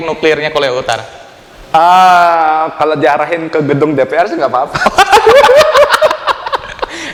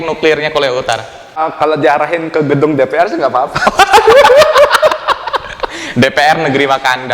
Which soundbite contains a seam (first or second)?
second